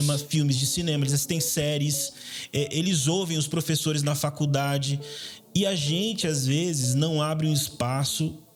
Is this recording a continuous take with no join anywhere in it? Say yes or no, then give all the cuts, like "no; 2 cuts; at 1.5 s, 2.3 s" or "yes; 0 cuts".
yes; 0 cuts